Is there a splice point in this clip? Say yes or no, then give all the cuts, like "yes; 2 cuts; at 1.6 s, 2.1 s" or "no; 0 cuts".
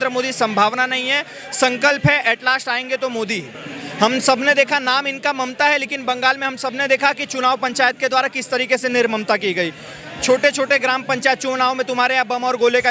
no; 0 cuts